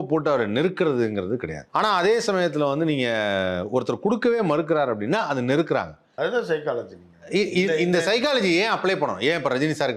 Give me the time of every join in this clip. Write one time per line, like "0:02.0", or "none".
0:01.6
0:06.0